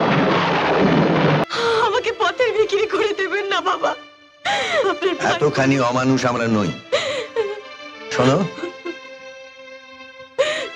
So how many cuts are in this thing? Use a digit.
1